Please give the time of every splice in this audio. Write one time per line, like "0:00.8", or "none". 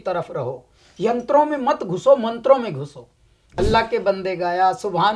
0:03.4